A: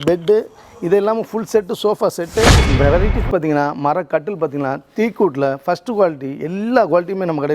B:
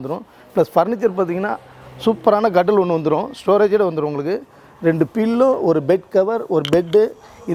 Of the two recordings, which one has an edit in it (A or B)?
A